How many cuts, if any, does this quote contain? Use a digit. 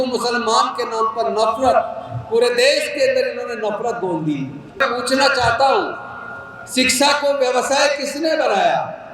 1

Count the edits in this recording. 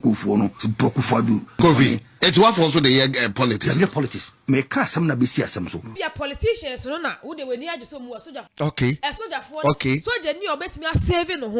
3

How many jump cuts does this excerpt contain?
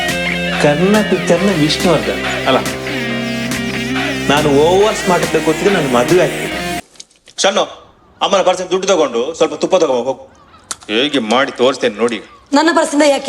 1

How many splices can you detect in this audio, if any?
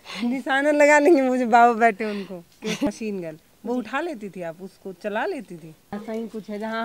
2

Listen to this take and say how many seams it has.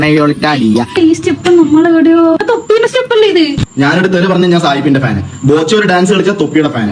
1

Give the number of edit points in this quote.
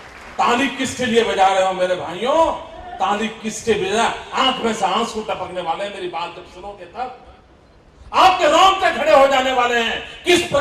0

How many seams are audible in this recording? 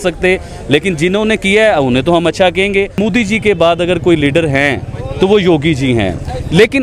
1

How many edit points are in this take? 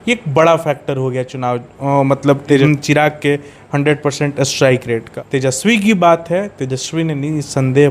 2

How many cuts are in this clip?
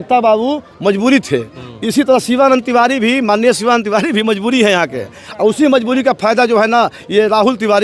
0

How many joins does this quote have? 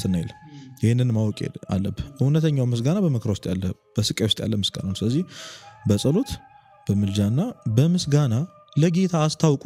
0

